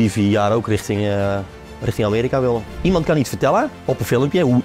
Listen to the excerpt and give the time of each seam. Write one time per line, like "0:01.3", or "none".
0:02.7
0:03.8